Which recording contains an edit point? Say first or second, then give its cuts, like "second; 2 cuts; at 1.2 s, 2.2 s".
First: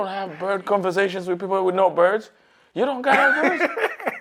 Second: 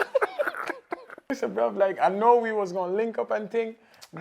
second; 1 cut; at 1.3 s